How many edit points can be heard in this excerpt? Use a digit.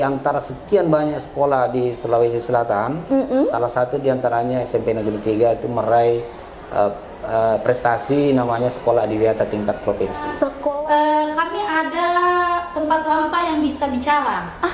1